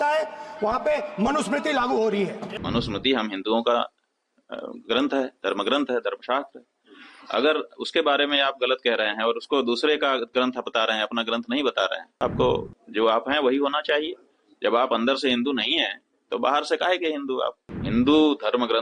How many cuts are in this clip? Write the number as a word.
three